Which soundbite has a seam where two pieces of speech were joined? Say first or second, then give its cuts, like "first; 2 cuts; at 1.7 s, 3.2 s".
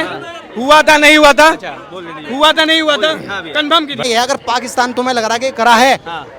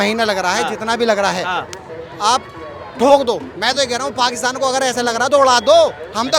first; 1 cut; at 4.0 s